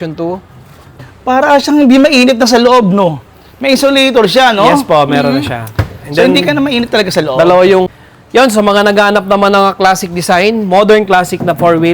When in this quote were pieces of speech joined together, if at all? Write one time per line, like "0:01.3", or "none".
0:00.9
0:07.9